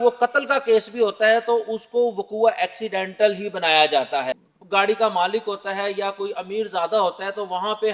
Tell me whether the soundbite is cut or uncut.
cut